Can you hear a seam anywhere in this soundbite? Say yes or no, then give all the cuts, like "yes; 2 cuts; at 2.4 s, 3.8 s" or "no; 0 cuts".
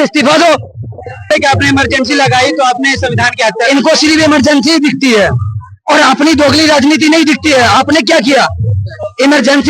yes; 1 cut; at 1.3 s